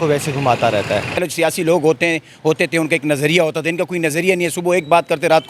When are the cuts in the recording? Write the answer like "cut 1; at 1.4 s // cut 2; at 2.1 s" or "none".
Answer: cut 1; at 1.2 s